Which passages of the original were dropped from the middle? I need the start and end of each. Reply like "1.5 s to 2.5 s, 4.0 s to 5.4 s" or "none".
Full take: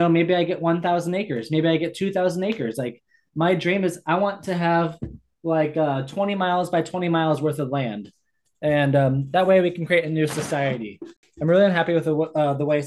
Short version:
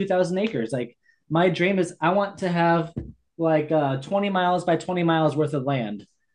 none